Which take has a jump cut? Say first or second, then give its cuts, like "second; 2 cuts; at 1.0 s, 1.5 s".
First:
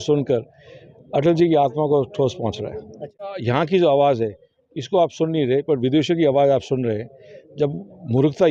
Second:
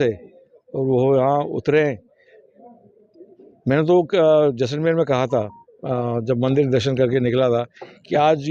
first; 1 cut; at 3.3 s